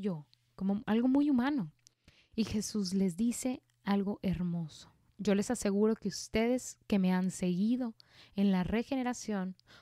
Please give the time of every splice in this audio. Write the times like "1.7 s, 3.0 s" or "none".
none

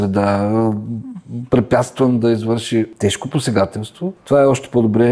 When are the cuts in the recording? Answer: 2.9 s, 4.2 s

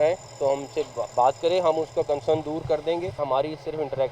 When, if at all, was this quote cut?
3.2 s

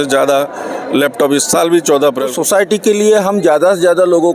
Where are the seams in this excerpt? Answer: 2.3 s

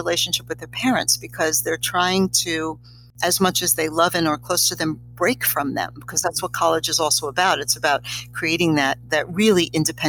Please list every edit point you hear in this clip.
none

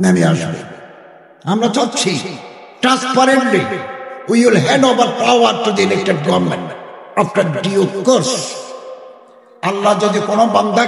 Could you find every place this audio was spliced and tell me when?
9.7 s

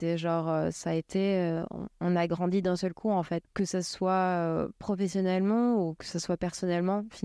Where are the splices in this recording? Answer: 3.5 s

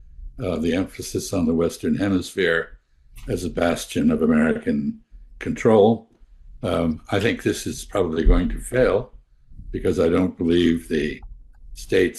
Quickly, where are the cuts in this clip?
none

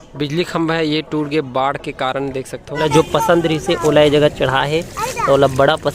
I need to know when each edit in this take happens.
2.8 s

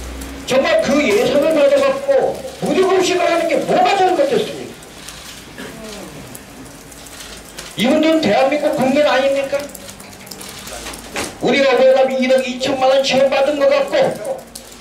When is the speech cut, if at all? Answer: 2.6 s

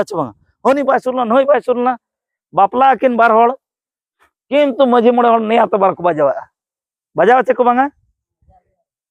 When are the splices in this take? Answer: none

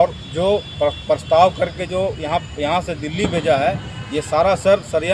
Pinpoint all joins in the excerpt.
none

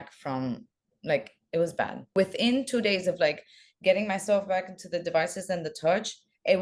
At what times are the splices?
2.1 s

